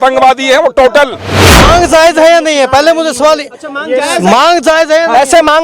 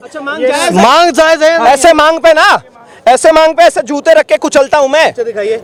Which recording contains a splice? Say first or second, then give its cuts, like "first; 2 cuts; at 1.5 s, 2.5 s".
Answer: first; 1 cut; at 1.6 s